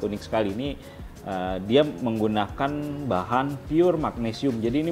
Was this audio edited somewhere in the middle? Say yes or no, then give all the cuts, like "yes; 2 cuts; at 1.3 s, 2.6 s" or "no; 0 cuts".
no; 0 cuts